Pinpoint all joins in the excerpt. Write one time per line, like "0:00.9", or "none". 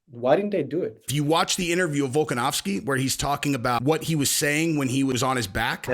0:01.0
0:03.8
0:05.2